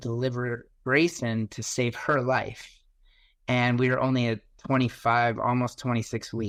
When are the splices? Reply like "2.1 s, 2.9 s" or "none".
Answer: none